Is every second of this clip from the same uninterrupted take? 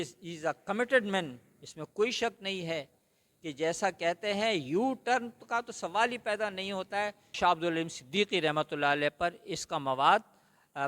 no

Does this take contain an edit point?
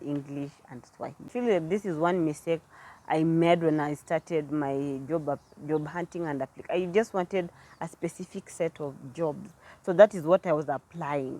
yes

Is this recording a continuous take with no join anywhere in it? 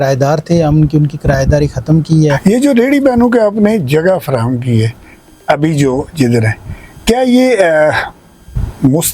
no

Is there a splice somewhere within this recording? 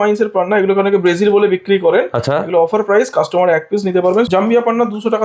yes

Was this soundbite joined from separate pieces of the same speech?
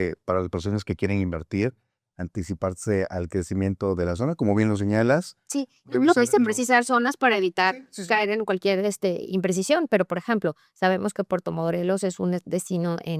no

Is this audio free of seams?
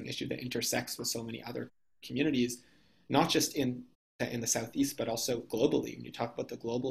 no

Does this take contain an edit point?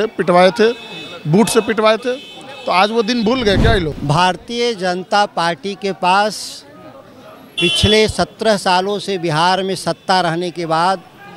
yes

